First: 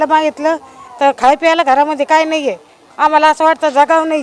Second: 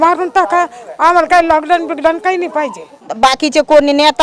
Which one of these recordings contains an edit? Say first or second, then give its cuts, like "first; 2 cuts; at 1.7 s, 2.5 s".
second; 1 cut; at 3.1 s